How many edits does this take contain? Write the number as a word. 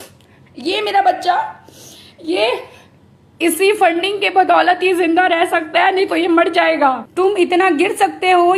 one